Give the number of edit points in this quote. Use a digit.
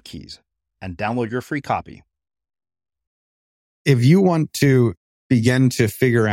2